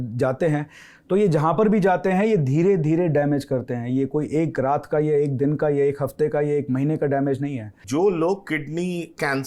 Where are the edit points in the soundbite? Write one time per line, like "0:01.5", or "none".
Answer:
0:07.8

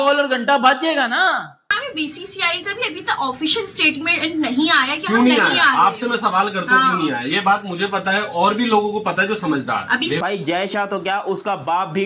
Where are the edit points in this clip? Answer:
0:01.7
0:10.2

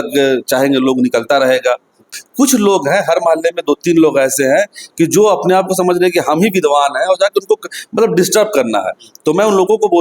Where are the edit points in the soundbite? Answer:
0:02.0

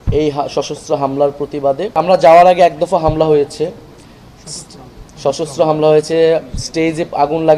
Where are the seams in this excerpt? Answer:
0:02.0

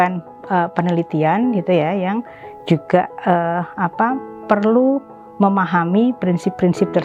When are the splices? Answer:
none

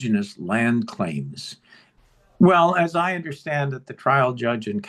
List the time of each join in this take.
0:01.6

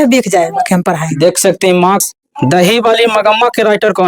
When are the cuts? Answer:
0:02.1

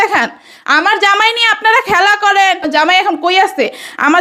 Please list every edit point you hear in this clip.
0:02.6

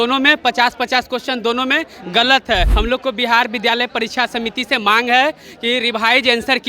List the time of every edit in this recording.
0:02.7

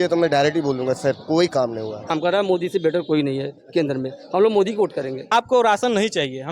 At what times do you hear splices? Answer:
0:02.1
0:05.3

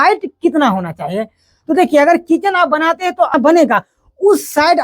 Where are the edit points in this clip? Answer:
0:03.3

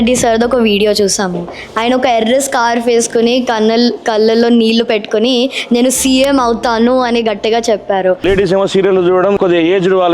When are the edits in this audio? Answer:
0:08.2
0:09.4

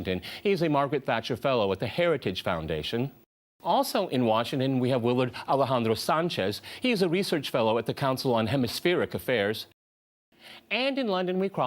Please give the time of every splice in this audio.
0:02.4

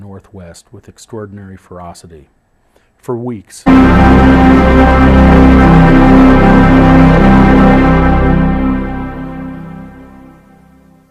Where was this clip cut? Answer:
none

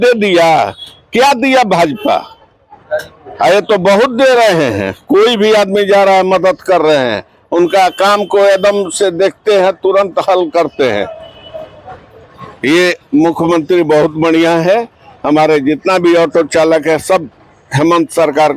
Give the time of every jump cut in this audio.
none

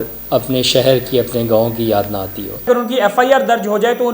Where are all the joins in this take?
0:02.7

